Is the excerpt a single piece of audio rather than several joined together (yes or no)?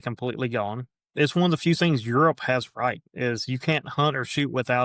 no